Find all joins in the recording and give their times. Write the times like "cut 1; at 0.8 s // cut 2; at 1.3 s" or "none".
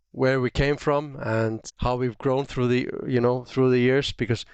cut 1; at 1.7 s